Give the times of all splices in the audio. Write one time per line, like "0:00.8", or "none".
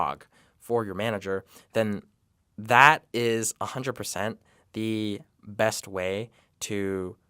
none